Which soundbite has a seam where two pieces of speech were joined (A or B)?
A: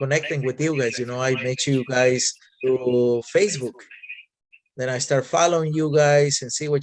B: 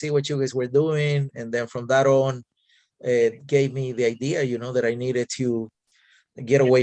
A